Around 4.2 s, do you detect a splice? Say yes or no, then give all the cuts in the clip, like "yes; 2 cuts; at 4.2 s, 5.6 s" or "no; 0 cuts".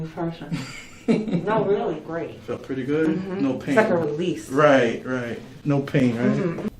no; 1 cut; at 2.1 s